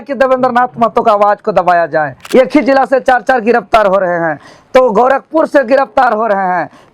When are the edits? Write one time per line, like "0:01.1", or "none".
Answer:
0:02.2